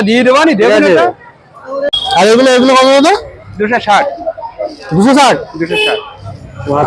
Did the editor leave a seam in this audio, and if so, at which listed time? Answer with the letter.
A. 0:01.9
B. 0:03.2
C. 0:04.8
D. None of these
A